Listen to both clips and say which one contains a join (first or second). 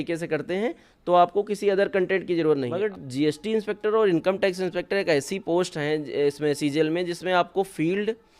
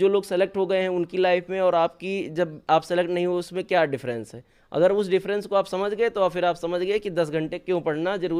first